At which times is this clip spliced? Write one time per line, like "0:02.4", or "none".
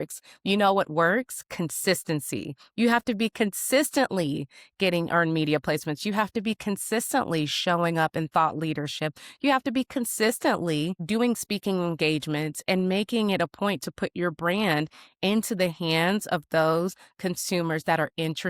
0:11.0